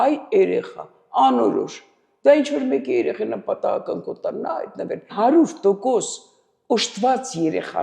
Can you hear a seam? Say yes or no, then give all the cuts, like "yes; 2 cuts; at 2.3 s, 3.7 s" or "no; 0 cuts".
yes; 1 cut; at 5.1 s